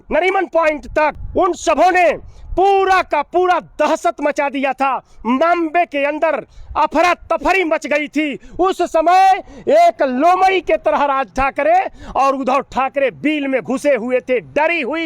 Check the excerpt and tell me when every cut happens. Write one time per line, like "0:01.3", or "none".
0:01.2